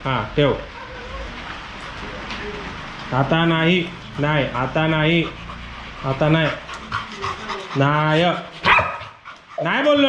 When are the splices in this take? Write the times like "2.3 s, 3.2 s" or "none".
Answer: 1.3 s